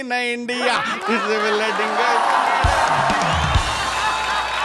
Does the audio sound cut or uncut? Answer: uncut